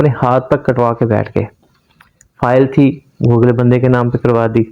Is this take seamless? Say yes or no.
yes